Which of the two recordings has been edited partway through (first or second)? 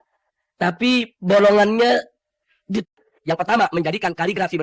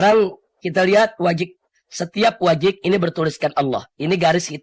first